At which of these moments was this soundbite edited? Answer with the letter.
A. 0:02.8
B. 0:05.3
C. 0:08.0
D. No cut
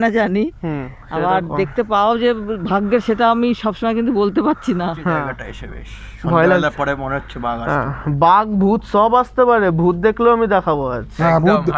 B